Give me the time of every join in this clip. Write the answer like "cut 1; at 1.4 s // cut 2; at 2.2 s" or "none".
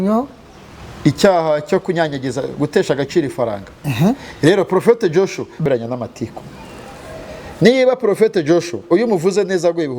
cut 1; at 5.6 s